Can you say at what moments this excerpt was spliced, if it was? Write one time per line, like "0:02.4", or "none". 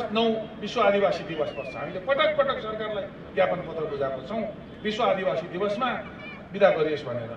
none